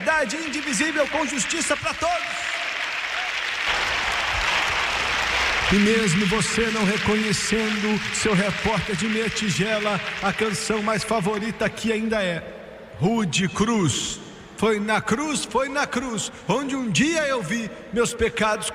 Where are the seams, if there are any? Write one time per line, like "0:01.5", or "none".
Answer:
0:03.7